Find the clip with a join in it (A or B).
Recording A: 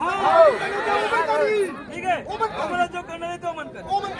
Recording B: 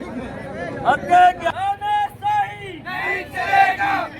B